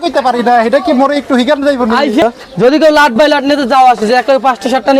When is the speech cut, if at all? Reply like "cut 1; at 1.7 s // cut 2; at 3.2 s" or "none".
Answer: cut 1; at 2.2 s